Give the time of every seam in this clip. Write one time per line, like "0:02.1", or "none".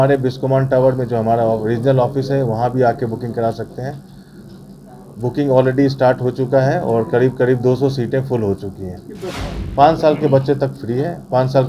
0:09.4

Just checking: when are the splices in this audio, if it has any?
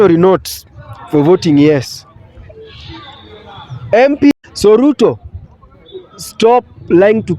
0:04.3

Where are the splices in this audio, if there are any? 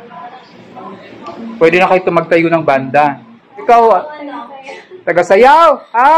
0:03.6

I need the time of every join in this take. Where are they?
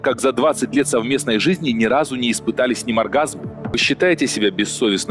0:03.8

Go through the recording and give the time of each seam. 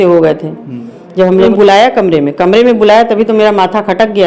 0:01.5

